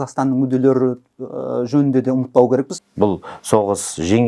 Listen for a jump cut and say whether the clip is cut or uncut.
cut